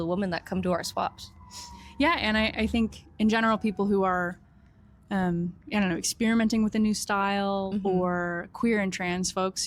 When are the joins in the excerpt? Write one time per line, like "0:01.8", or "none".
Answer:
none